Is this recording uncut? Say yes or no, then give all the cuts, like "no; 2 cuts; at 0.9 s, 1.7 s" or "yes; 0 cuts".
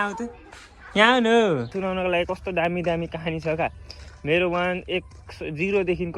no; 1 cut; at 1.7 s